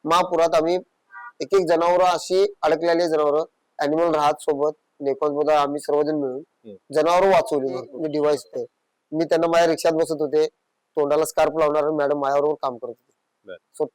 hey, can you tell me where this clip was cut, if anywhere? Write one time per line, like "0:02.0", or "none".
0:07.9